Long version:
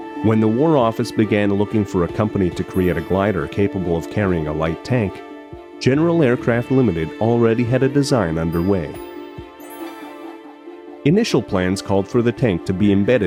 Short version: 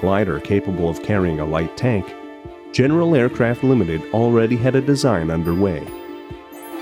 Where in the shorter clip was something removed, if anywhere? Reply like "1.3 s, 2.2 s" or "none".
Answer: none